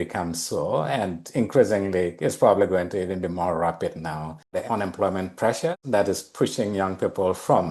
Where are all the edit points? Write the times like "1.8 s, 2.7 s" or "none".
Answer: 4.6 s, 5.8 s